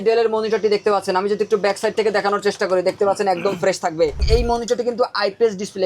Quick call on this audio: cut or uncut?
cut